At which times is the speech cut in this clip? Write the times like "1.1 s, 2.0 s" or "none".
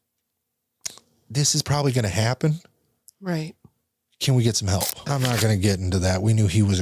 5.0 s